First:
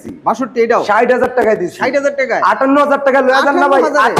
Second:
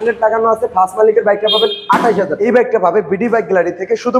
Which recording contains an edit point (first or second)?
second